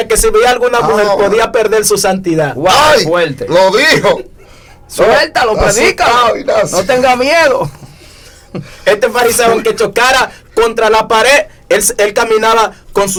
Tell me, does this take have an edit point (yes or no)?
no